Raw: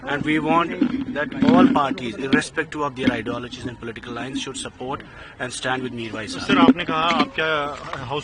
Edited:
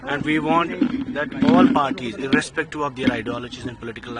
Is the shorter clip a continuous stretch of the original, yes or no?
yes